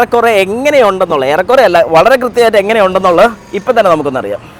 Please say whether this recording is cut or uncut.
uncut